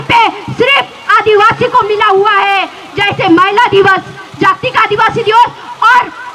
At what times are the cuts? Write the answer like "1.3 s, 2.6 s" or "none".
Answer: none